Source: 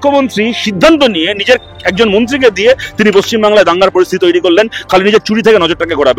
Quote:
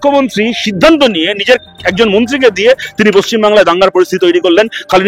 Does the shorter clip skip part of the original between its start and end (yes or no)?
no